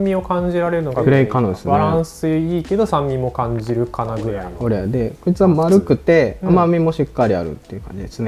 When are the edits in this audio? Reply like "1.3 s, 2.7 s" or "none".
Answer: 1.0 s, 4.5 s